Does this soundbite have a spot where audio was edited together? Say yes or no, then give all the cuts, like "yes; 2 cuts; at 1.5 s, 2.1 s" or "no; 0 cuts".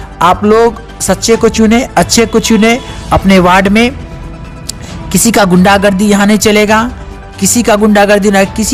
no; 0 cuts